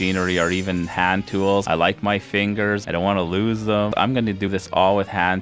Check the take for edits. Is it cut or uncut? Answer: cut